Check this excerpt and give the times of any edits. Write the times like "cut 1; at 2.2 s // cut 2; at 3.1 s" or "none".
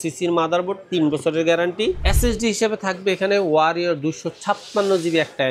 cut 1; at 2.1 s